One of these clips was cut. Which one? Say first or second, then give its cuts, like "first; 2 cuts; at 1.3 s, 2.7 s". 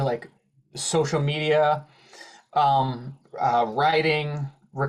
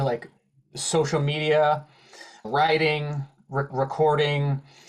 second; 2 cuts; at 2.5 s, 3.7 s